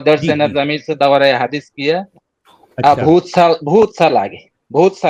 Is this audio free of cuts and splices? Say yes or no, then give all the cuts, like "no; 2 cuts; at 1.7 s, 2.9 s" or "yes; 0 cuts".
yes; 0 cuts